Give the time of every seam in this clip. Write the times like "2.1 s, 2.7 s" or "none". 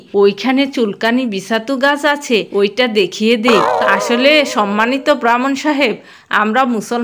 3.7 s